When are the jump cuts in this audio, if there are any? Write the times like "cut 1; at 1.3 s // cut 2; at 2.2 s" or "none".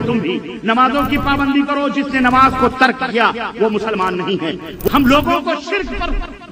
cut 1; at 4.7 s